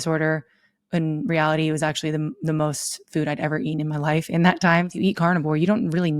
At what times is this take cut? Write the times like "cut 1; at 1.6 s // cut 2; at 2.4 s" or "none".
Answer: cut 1; at 4.9 s